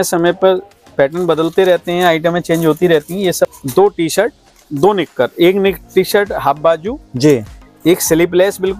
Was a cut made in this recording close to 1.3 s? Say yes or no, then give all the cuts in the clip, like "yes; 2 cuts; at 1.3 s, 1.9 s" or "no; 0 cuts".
no; 1 cut; at 3.5 s